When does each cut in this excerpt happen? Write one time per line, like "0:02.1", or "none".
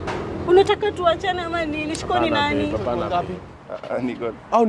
0:03.1